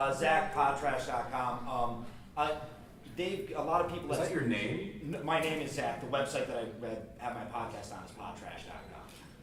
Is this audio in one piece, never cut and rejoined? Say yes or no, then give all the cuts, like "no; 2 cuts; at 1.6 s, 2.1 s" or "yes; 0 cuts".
yes; 0 cuts